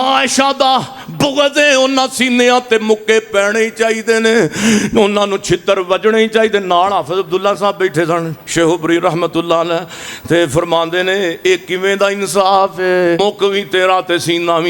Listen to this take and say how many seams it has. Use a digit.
1